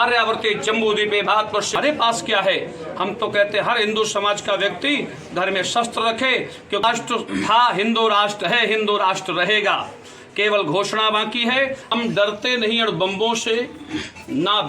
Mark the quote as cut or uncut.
cut